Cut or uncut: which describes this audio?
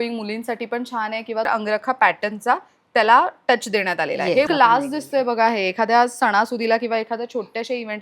cut